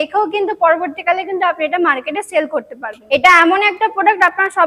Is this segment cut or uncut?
cut